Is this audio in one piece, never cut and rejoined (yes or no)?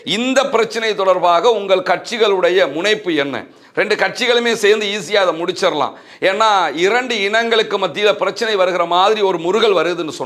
yes